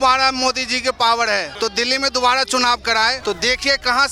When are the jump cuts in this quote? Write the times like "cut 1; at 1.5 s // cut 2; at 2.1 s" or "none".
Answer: cut 1; at 1.5 s // cut 2; at 3.2 s